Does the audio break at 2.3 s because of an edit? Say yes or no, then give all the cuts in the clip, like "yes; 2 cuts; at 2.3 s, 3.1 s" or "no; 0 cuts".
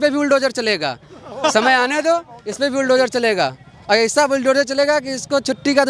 no; 0 cuts